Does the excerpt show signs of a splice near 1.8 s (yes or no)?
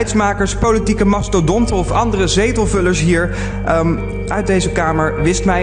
no